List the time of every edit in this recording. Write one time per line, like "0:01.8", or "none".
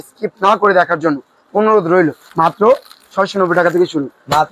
0:02.2